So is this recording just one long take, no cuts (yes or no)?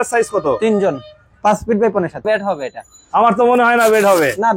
no